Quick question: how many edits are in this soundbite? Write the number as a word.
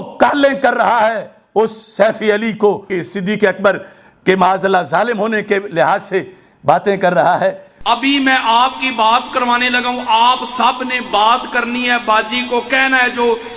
one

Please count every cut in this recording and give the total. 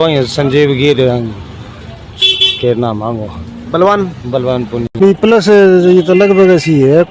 one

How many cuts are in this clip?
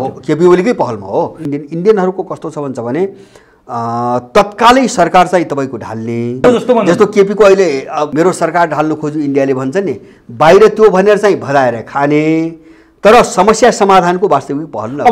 three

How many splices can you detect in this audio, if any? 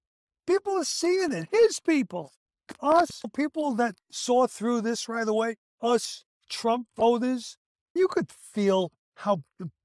one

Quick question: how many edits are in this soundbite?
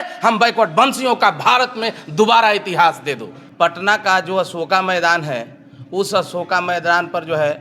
one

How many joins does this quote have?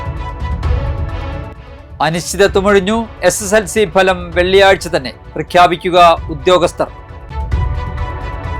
one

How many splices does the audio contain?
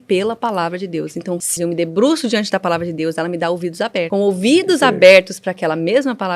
two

